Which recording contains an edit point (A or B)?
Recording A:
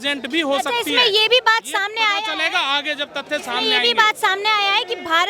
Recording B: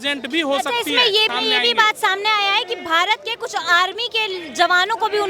B